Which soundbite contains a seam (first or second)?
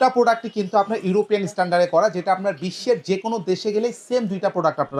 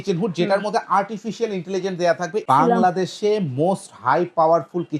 second